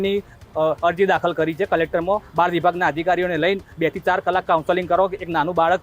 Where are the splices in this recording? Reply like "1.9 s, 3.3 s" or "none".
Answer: 2.3 s